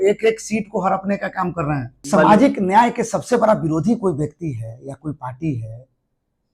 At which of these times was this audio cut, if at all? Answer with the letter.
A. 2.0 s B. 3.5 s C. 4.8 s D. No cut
A